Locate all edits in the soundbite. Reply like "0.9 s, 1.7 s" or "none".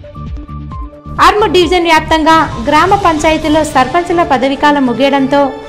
none